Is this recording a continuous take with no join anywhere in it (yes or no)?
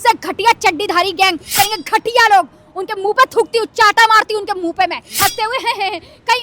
no